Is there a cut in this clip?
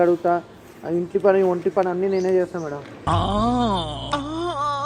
no; 0 cuts

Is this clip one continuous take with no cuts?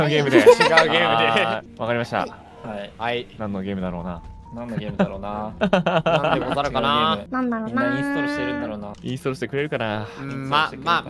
yes; 0 cuts

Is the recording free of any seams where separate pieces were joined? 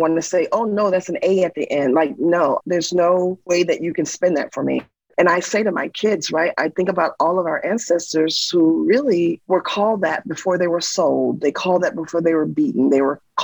no; 1 cut; at 5.0 s

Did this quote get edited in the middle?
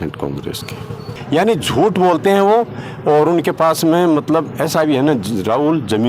yes; 1 cut; at 1.1 s

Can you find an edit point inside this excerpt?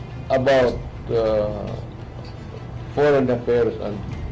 no; 0 cuts

